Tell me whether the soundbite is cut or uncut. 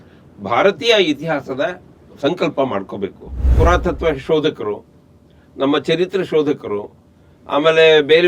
cut